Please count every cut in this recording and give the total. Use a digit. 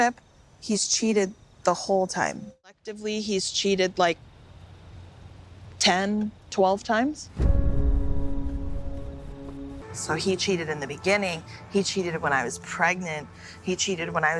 2